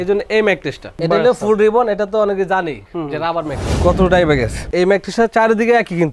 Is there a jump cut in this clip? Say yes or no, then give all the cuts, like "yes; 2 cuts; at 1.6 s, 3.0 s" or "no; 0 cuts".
yes; 2 cuts; at 0.9 s, 3.6 s